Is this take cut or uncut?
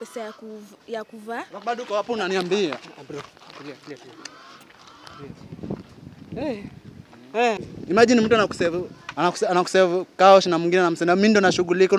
cut